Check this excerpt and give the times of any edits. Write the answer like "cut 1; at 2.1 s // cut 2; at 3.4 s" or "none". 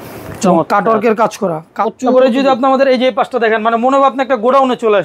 cut 1; at 1.7 s

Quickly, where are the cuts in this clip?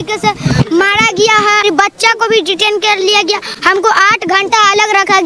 cut 1; at 1.6 s // cut 2; at 3.5 s

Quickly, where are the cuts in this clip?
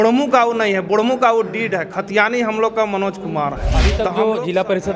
cut 1; at 3.9 s

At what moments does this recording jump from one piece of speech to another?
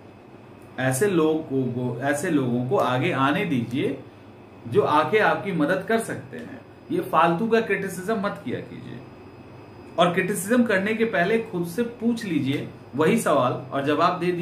none

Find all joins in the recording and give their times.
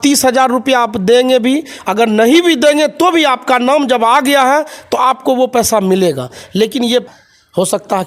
cut 1; at 7.0 s

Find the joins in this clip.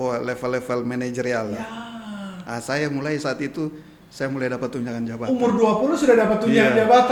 none

